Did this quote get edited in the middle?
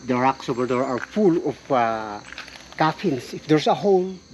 no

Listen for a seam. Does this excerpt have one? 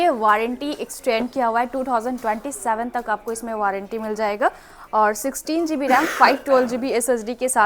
no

